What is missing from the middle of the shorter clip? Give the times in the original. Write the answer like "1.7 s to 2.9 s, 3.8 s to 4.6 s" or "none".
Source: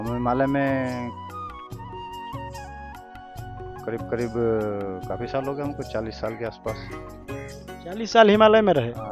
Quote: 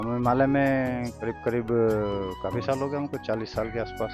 1.1 s to 3.8 s